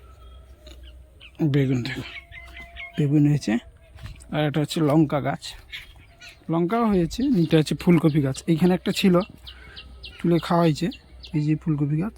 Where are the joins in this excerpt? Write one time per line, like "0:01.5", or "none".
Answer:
0:07.5